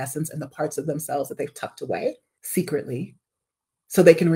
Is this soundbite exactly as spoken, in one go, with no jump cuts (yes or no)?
no